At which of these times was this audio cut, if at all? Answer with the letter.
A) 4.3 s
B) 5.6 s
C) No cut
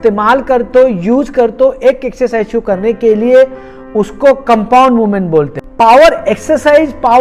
B